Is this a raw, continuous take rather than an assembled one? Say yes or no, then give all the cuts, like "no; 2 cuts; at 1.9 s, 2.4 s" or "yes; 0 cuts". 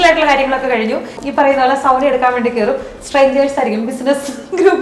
no; 1 cut; at 1.2 s